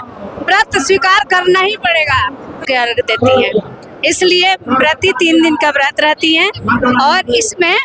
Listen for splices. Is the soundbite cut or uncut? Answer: cut